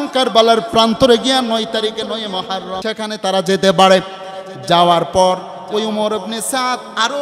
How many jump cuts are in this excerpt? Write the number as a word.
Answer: one